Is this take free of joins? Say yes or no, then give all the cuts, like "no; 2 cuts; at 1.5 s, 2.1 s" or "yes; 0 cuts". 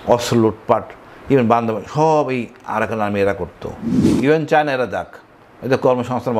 no; 1 cut; at 4.0 s